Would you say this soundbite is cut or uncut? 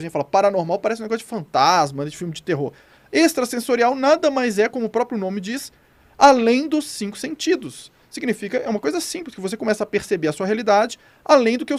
uncut